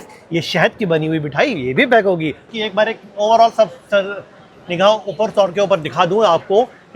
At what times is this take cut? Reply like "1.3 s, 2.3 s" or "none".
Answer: 2.4 s